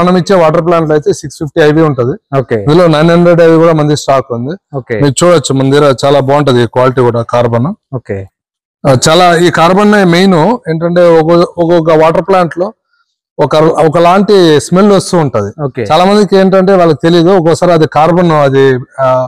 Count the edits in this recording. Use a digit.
0